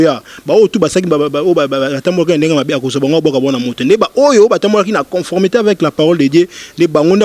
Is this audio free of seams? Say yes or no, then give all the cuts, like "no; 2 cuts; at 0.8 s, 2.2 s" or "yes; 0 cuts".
yes; 0 cuts